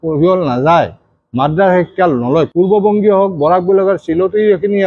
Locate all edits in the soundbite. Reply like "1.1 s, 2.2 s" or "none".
2.5 s